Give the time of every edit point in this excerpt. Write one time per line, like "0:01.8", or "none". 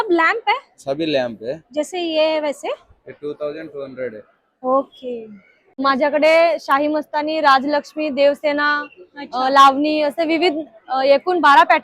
0:05.8